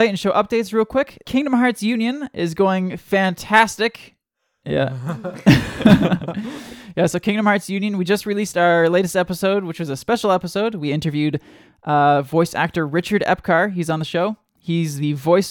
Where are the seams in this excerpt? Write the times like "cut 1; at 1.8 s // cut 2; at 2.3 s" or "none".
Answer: cut 1; at 1.2 s // cut 2; at 4.5 s